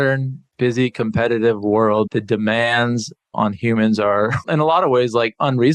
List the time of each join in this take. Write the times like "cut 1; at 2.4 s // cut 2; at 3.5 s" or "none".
cut 1; at 2.1 s // cut 2; at 3.3 s // cut 3; at 4.4 s